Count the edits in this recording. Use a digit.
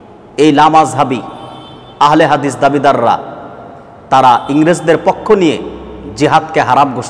0